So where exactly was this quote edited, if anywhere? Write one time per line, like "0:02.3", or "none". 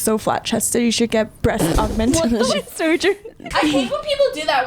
0:01.4
0:03.4